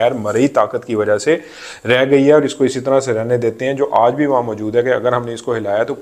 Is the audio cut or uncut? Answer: uncut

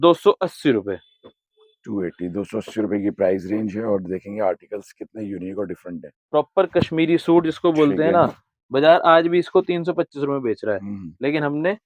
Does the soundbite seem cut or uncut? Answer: uncut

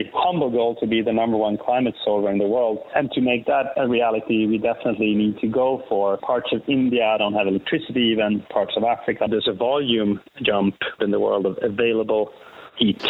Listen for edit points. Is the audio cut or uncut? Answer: cut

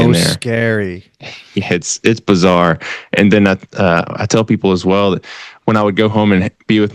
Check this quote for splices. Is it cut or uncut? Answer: uncut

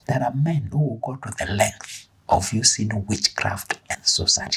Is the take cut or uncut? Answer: uncut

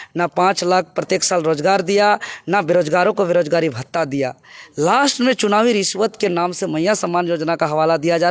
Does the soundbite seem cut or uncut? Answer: uncut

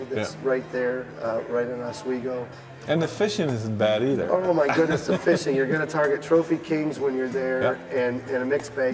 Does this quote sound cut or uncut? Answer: cut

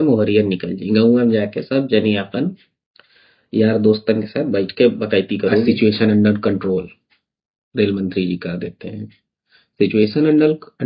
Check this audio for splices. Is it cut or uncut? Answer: cut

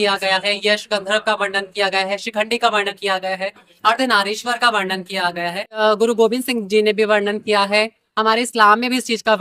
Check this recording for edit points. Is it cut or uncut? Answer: cut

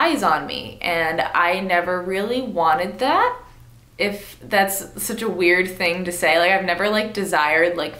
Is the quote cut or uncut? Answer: uncut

